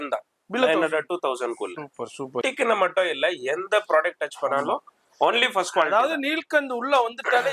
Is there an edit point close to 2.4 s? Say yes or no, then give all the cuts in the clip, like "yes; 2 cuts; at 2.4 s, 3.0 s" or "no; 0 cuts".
yes; 1 cut; at 2.4 s